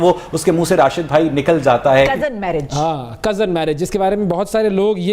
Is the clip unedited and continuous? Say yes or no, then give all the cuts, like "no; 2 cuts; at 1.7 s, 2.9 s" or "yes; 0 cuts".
no; 1 cut; at 2.1 s